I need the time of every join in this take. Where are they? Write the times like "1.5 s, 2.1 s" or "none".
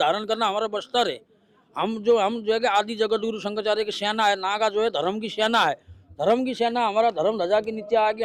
none